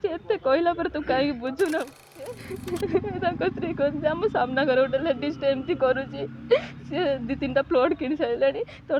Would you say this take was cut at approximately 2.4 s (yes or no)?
yes